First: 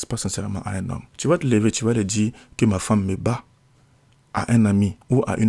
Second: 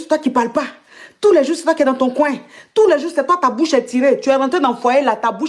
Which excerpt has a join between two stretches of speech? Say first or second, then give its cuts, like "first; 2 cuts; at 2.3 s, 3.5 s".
first; 1 cut; at 1.1 s